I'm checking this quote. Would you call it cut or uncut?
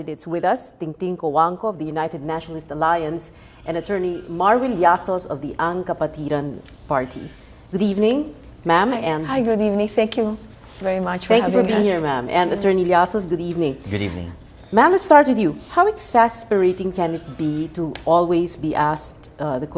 cut